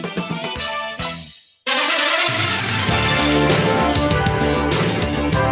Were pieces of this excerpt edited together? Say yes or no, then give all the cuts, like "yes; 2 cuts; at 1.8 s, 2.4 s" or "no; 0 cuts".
yes; 1 cut; at 1.5 s